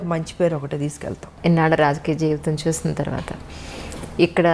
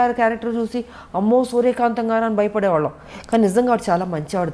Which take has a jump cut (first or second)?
first